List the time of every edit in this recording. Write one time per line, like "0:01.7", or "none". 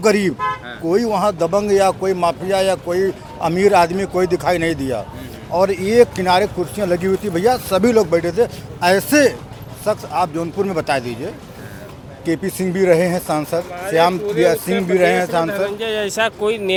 none